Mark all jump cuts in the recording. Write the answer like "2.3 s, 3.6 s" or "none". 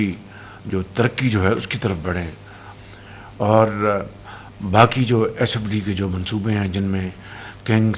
2.6 s